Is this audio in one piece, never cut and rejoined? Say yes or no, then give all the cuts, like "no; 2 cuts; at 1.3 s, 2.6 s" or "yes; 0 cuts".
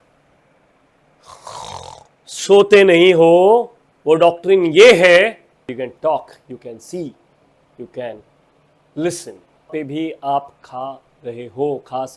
no; 2 cuts; at 5.7 s, 9.7 s